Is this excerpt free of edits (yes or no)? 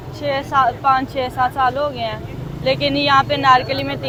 yes